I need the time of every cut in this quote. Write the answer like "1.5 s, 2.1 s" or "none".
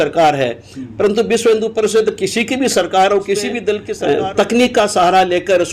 3.9 s